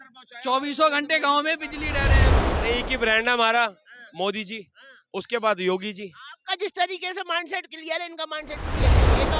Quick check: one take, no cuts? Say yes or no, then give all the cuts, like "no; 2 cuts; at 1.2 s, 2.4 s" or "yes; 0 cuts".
no; 1 cut; at 2.3 s